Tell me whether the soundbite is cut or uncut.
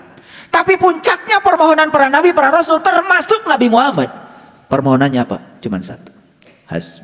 uncut